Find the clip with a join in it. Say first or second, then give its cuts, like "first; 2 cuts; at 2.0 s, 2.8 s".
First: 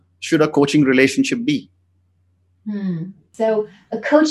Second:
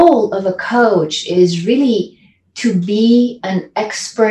first; 1 cut; at 3.2 s